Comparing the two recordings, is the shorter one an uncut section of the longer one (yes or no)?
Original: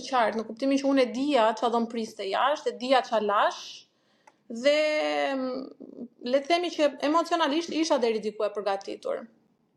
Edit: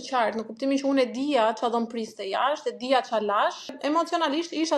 no